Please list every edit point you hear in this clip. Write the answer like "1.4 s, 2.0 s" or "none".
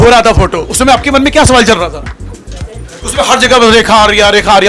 none